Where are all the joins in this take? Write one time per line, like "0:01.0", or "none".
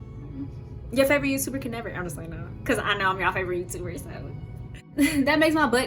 0:04.9